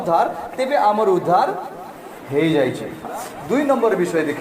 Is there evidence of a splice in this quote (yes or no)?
yes